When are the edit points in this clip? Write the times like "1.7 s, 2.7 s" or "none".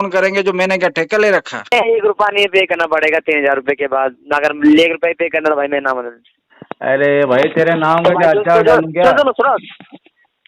1.7 s